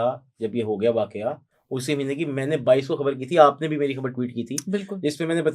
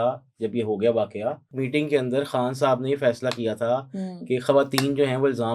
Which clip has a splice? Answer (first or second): second